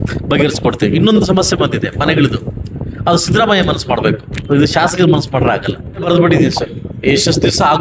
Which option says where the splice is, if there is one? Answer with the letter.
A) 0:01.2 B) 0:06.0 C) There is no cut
B